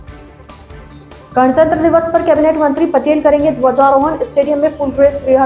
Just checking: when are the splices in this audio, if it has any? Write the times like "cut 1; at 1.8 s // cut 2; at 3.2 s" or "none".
none